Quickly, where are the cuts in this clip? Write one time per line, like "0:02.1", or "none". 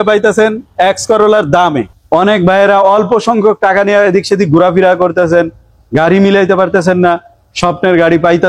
0:01.8